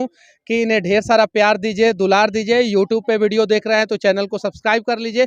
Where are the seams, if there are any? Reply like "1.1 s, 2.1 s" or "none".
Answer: none